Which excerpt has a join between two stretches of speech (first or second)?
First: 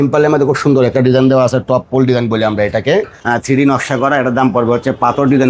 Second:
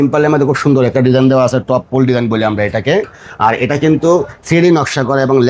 first